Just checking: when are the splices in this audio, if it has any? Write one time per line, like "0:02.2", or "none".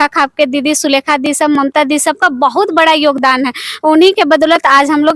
none